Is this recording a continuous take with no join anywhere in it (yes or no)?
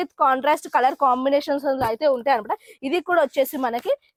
yes